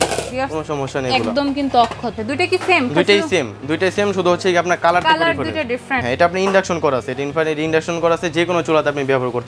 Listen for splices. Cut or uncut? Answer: cut